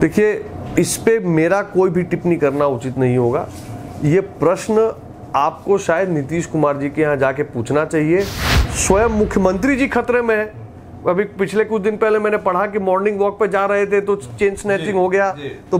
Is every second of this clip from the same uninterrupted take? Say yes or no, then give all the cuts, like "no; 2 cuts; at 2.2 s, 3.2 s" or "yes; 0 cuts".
no; 1 cut; at 8.5 s